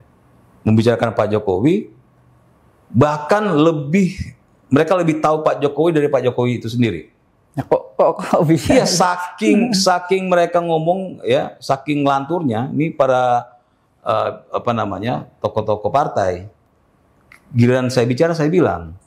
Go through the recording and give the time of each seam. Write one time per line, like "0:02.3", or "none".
none